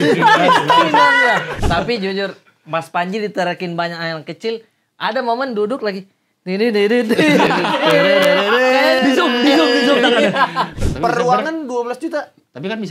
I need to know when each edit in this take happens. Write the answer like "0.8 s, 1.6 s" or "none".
1.6 s, 10.8 s